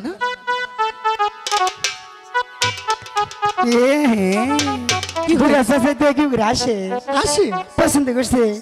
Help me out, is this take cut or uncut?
uncut